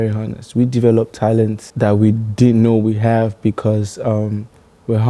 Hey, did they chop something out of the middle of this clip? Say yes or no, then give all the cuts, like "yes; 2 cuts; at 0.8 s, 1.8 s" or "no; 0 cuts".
yes; 1 cut; at 1.6 s